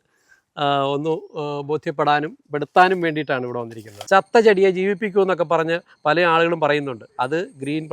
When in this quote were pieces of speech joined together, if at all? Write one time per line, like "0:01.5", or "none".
0:03.9

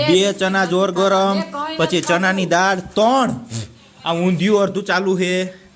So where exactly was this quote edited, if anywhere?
none

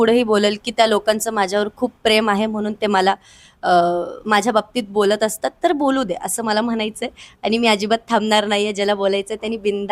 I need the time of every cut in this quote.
none

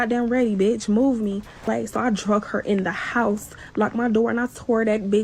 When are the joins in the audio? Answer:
0:01.6
0:03.6

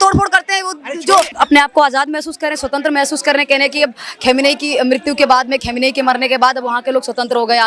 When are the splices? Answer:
0:01.3

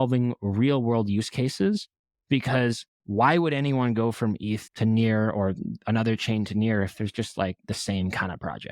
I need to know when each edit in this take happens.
0:04.7

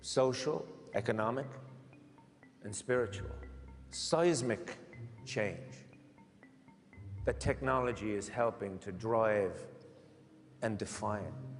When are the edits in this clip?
none

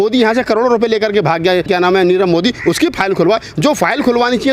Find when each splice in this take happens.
0:01.7

